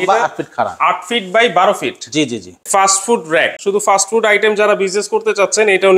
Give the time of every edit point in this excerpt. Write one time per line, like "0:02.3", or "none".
0:02.5
0:03.6